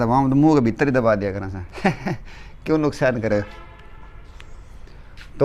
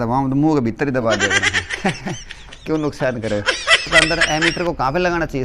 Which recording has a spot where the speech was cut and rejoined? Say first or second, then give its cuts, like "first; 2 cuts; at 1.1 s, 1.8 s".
second; 1 cut; at 3.9 s